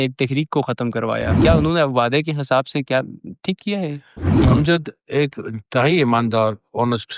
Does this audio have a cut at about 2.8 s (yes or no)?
no